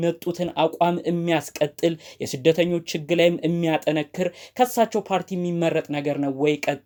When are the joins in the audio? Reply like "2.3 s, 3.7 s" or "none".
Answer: none